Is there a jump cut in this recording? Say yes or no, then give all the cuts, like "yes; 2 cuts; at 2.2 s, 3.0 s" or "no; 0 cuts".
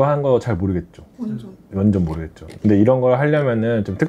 no; 0 cuts